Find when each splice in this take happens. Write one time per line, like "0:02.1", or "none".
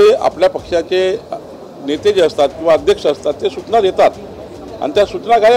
none